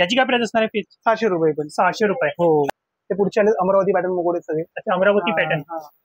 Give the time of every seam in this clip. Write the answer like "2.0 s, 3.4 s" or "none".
2.7 s